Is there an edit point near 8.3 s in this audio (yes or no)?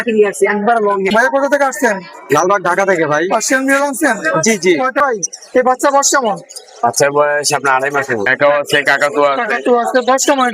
yes